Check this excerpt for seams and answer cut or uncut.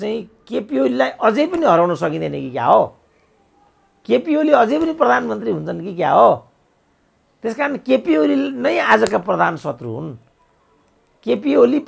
uncut